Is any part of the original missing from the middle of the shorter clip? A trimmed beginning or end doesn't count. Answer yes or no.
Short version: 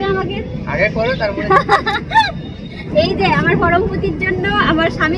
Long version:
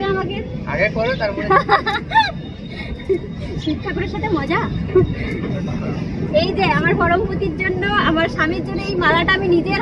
yes